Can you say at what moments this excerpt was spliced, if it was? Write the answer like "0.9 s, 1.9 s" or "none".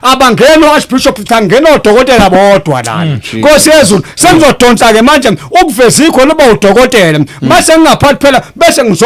none